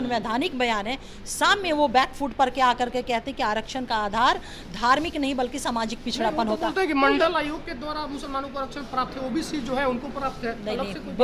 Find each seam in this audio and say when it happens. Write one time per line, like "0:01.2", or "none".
none